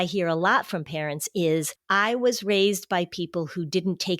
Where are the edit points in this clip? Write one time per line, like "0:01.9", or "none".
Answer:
0:01.8